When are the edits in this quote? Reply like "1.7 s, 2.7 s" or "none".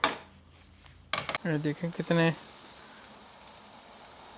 1.3 s